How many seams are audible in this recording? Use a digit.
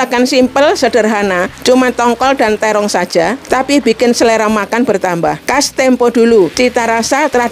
4